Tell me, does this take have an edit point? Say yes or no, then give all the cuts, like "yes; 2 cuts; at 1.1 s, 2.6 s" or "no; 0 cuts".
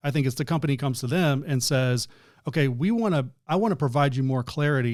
no; 0 cuts